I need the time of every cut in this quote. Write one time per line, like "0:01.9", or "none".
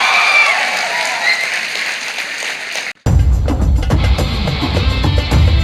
0:02.9